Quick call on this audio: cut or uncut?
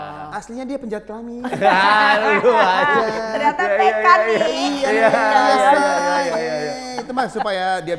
uncut